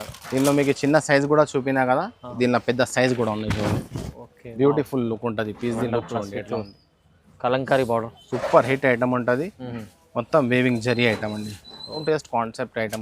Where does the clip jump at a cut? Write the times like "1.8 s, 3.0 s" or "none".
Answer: 12.0 s